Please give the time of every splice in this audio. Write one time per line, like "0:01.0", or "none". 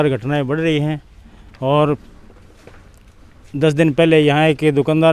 none